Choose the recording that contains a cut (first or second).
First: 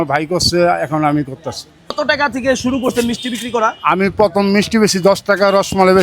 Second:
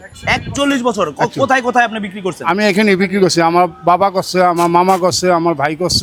first